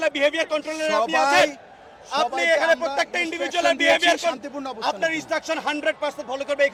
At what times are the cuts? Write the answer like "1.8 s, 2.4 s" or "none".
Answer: none